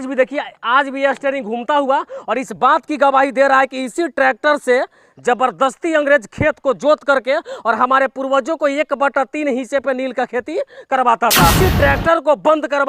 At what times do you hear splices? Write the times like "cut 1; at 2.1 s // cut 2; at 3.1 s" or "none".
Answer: cut 1; at 11.5 s